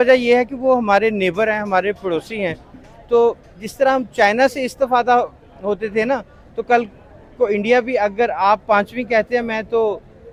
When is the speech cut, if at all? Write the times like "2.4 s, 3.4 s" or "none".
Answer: none